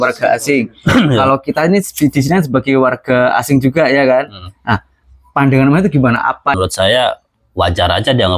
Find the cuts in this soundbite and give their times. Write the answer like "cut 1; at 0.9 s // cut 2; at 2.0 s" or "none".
cut 1; at 6.5 s